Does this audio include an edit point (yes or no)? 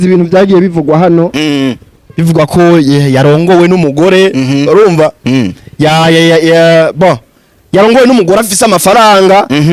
no